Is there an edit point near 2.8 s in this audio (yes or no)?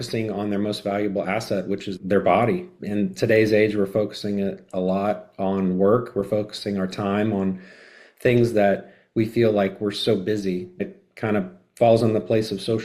yes